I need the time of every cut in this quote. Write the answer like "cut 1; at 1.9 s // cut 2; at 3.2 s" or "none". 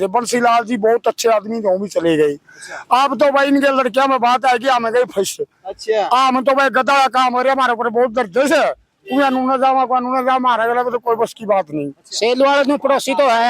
cut 1; at 12.0 s